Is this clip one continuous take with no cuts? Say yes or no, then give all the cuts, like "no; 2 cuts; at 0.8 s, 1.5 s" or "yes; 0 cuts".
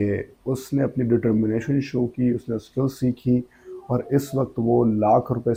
yes; 0 cuts